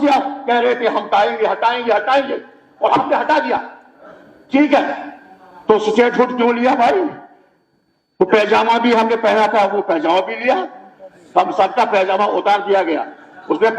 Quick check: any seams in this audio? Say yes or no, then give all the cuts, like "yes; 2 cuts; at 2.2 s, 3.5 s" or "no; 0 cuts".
no; 0 cuts